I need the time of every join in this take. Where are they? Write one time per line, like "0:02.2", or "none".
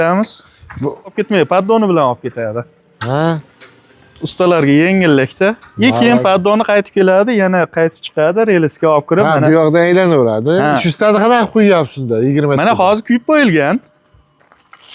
0:01.1
0:10.8